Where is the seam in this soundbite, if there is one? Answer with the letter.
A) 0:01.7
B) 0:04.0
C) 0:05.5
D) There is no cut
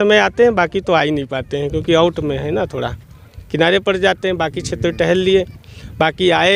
D